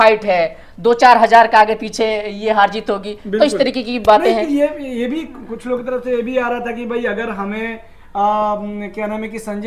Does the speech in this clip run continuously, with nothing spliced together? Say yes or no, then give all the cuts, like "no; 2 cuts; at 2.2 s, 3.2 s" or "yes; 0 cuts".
yes; 0 cuts